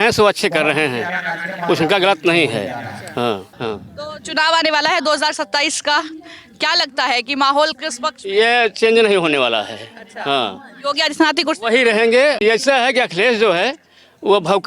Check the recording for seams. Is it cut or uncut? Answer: cut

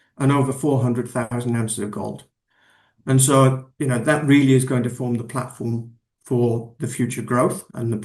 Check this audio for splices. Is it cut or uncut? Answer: uncut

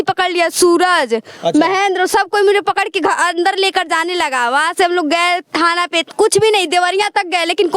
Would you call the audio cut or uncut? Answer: uncut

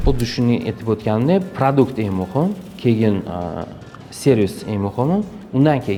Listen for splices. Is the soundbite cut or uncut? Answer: uncut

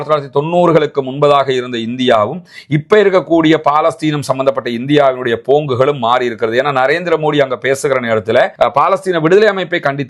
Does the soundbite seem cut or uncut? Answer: cut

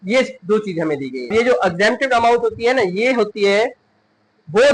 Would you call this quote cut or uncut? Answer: cut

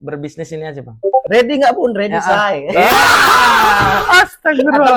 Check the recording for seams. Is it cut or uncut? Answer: cut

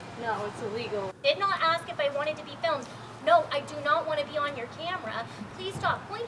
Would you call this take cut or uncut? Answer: cut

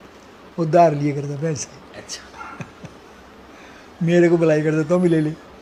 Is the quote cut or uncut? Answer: uncut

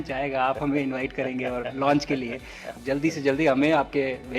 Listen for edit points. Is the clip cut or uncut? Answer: cut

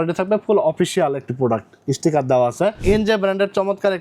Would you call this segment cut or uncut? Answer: cut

